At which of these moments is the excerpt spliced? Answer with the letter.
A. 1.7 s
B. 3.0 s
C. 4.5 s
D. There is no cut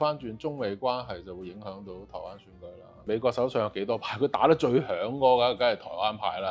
B